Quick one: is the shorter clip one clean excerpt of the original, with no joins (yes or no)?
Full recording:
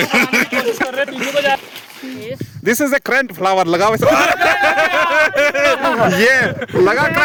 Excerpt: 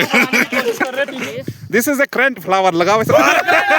no